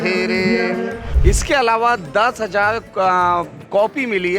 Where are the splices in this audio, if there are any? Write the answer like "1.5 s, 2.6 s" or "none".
1.0 s